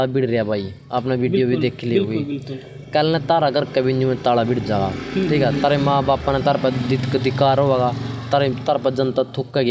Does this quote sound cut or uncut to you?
uncut